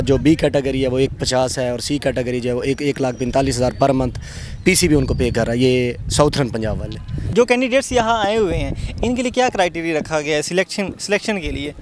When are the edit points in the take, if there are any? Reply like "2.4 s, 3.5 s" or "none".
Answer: none